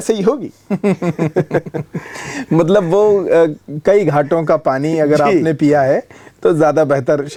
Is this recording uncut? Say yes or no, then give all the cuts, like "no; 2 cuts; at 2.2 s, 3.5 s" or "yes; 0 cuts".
yes; 0 cuts